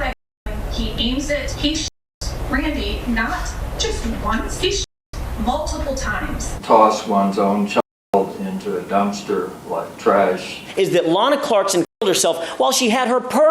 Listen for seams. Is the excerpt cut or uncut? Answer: cut